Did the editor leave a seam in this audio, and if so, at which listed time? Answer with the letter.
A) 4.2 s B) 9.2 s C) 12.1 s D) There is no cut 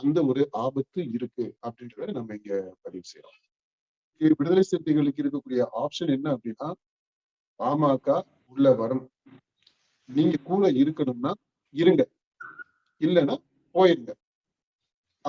A